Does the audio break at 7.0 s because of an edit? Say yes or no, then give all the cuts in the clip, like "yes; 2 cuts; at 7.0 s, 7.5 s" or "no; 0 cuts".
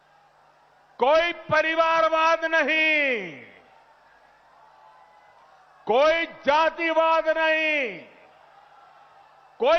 no; 0 cuts